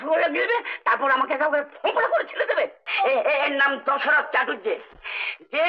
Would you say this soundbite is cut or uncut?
cut